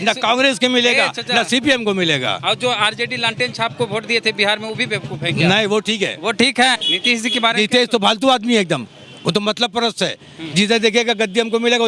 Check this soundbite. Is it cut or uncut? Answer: cut